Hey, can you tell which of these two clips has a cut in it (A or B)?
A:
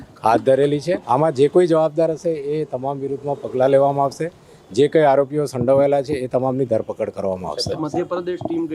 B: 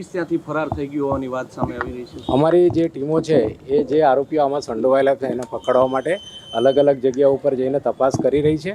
A